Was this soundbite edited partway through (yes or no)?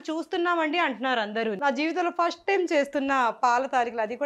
yes